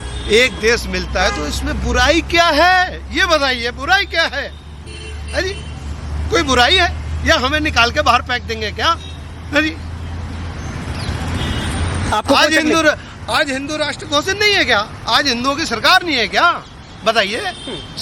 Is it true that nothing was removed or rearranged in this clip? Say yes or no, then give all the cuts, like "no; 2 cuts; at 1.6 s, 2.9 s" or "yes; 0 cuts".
yes; 0 cuts